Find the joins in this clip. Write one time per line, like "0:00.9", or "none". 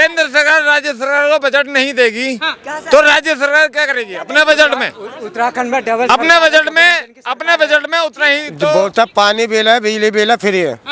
0:08.7